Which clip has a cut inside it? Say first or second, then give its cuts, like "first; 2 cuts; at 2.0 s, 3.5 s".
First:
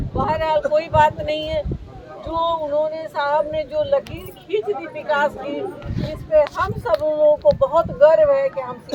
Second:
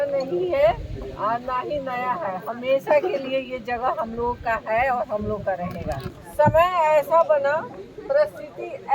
second; 1 cut; at 6.1 s